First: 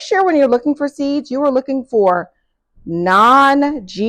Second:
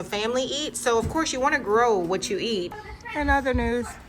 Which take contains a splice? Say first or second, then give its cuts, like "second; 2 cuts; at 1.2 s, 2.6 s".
second; 1 cut; at 2.7 s